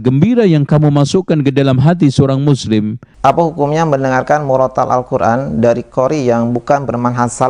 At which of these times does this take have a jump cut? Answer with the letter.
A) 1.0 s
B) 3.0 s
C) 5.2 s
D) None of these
B